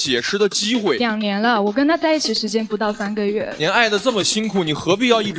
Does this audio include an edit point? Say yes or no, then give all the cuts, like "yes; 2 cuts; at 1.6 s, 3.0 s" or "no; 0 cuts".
yes; 2 cuts; at 1.0 s, 3.6 s